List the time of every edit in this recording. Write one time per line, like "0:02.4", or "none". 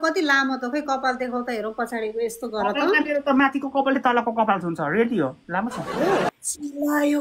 0:06.3